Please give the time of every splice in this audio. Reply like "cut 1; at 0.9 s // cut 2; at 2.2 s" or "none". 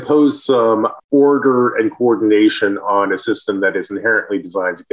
none